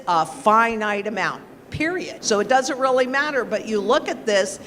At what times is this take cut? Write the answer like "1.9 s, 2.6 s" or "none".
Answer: 2.1 s